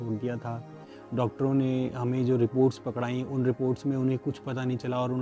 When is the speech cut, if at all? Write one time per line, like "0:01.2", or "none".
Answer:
0:00.9

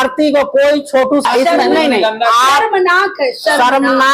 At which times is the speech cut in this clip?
0:01.2

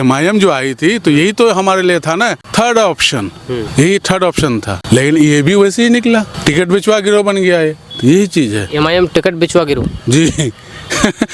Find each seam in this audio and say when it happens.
0:02.4
0:03.7
0:04.7
0:06.3

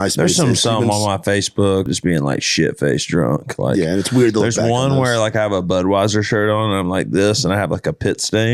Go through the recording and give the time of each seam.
0:01.9

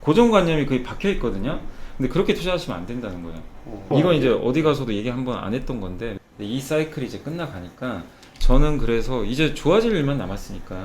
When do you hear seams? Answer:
0:03.9
0:06.1

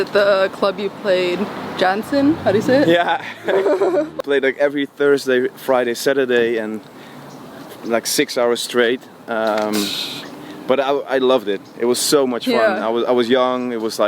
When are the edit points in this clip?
0:04.2

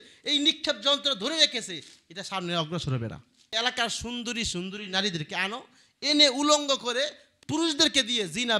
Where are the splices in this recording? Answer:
0:03.4

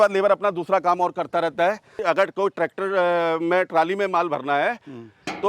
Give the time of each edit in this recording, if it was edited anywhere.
0:02.0

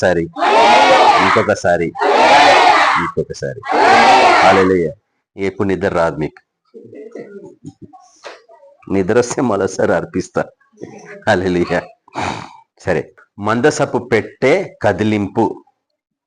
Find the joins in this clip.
0:13.2

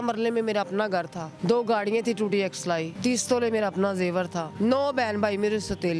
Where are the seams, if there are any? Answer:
0:01.2
0:02.9
0:04.4

